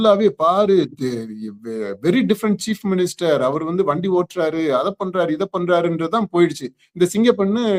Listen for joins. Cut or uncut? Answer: uncut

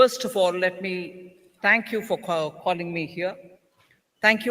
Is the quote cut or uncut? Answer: cut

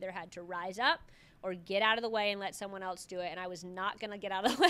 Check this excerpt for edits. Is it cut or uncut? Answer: uncut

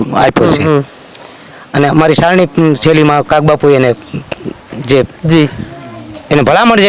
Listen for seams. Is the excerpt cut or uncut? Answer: uncut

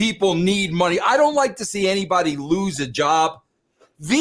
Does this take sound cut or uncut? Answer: uncut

